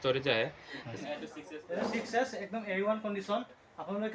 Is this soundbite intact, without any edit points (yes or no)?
no